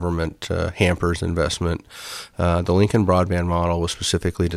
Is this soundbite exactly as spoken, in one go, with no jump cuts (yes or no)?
yes